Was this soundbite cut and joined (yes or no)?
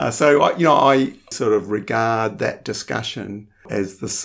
yes